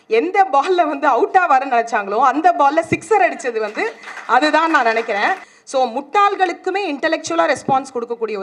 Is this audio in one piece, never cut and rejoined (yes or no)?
no